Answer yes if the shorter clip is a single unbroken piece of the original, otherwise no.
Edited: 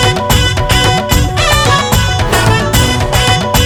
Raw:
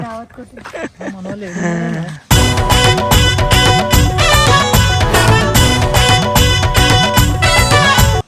yes